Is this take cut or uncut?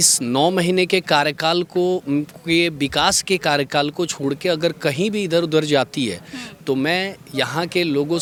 uncut